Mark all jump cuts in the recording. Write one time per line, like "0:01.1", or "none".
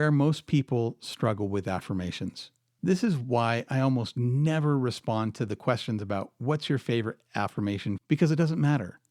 0:06.0
0:08.0